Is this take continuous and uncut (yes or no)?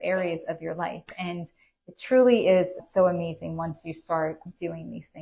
yes